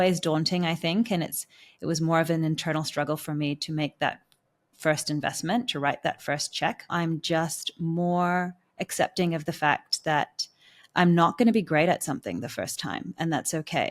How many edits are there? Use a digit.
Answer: 1